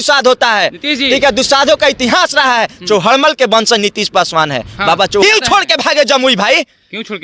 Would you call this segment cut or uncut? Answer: cut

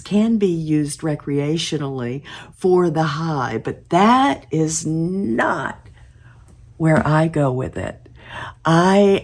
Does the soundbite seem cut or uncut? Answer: uncut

